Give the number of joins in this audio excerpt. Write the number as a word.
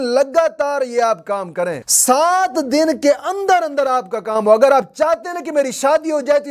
zero